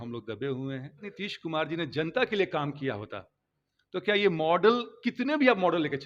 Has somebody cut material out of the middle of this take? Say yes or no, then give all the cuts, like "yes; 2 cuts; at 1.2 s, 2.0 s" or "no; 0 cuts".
yes; 1 cut; at 1.2 s